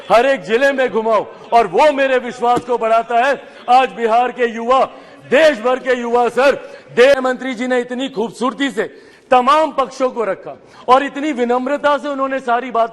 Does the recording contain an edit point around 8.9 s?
no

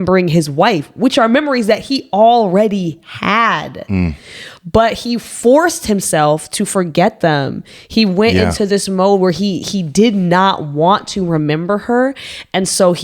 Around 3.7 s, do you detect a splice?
no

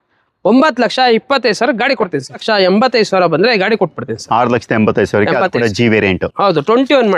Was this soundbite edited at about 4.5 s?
no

